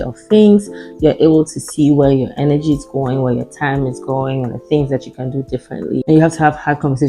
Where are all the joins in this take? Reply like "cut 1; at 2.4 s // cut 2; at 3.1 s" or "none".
none